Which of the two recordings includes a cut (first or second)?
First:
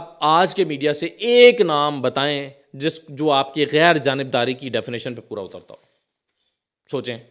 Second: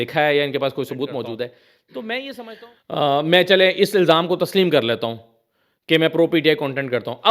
second